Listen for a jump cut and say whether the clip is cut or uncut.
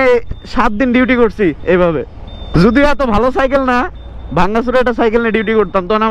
cut